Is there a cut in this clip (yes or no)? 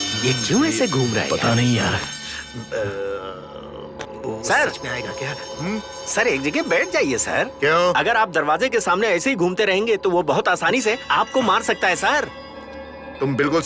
no